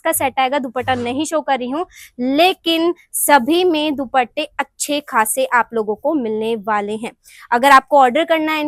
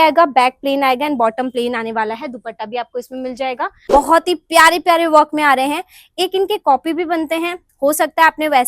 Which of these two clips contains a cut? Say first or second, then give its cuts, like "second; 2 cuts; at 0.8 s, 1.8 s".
second; 1 cut; at 3.8 s